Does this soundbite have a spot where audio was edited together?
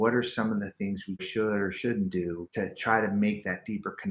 yes; 2 cuts; at 1.3 s, 2.4 s

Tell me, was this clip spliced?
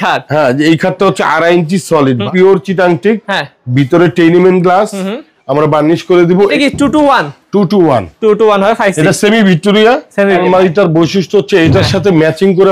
yes; 3 cuts; at 2.3 s, 6.5 s, 10.3 s

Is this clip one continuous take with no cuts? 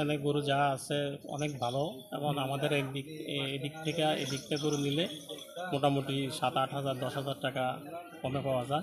yes; 0 cuts

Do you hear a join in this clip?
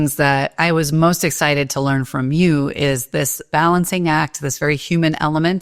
yes; 1 cut; at 3.4 s

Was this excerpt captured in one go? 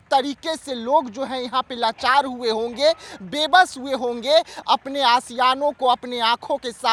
yes; 0 cuts

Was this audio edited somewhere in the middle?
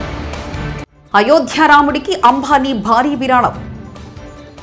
no; 0 cuts

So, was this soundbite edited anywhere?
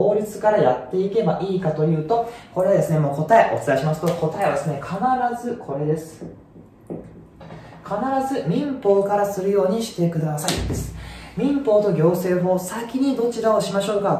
no; 0 cuts

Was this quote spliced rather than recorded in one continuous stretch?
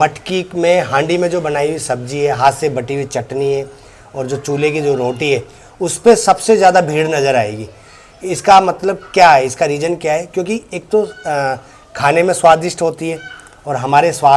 no; 0 cuts

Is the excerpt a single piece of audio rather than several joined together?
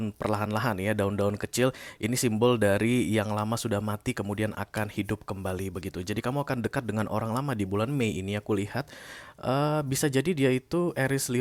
yes; 0 cuts

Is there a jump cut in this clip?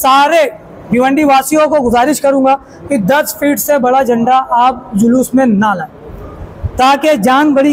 no; 0 cuts

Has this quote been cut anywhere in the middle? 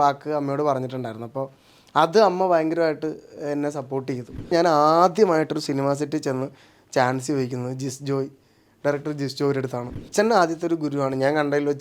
yes; 2 cuts; at 4.5 s, 10.0 s

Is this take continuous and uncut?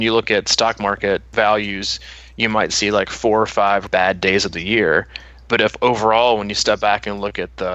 no; 2 cuts; at 1.3 s, 3.9 s

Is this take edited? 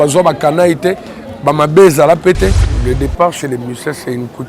yes; 1 cut; at 2.8 s

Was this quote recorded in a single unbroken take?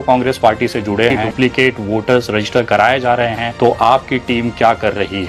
no; 2 cuts; at 1.2 s, 3.4 s

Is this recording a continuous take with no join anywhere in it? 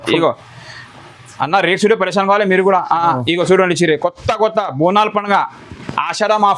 yes; 0 cuts

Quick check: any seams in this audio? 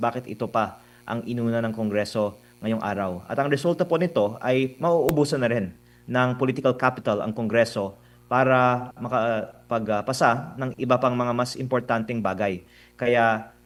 no; 0 cuts

